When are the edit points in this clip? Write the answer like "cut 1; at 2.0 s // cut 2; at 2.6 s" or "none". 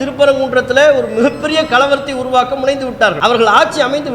cut 1; at 3.2 s